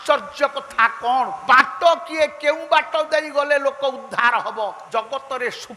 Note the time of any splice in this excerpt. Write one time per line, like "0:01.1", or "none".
0:01.4
0:04.8